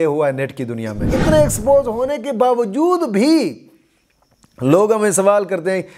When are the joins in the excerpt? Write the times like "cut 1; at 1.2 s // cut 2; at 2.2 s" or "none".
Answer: cut 1; at 1.0 s